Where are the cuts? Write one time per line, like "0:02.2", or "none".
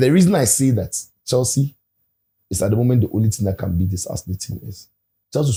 none